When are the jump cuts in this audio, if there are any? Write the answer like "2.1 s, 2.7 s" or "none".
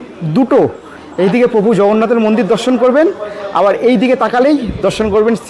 none